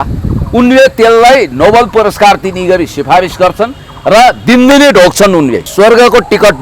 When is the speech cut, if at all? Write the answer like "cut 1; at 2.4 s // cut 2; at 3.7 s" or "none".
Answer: cut 1; at 5.7 s

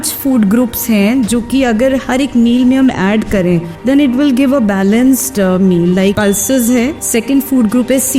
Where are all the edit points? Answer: cut 1; at 3.7 s // cut 2; at 6.2 s // cut 3; at 7.0 s

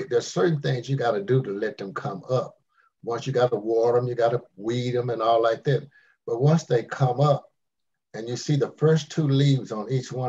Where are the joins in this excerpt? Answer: none

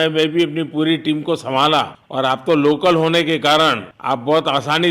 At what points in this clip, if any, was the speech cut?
none

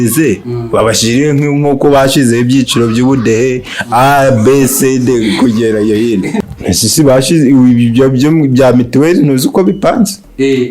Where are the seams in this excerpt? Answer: cut 1; at 6.3 s

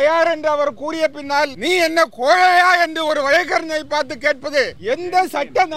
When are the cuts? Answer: cut 1; at 1.6 s // cut 2; at 4.8 s

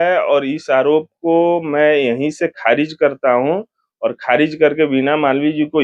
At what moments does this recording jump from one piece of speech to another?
none

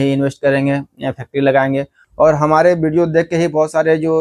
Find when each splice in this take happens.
cut 1; at 2.0 s

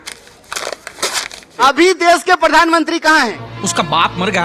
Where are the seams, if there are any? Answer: cut 1; at 1.5 s

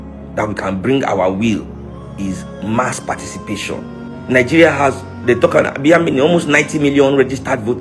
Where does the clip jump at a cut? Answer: cut 1; at 4.2 s

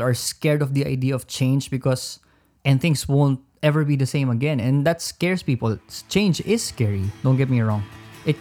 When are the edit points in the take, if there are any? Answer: cut 1; at 2.5 s

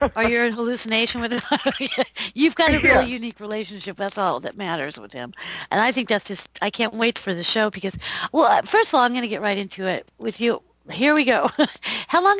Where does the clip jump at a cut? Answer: none

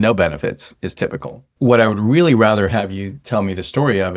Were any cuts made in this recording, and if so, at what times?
cut 1; at 1.5 s

